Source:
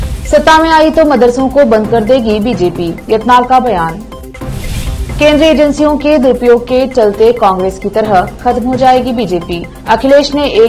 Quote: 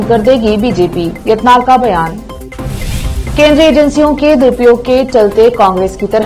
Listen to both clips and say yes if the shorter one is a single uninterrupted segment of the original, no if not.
yes